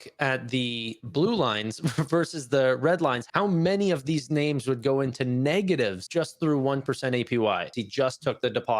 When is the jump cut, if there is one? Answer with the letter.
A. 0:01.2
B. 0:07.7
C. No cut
C